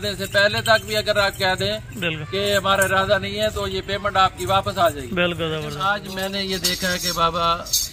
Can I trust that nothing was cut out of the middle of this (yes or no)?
no